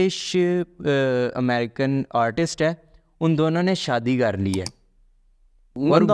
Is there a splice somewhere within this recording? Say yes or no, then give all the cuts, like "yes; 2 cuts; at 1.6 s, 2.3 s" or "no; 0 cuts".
no; 0 cuts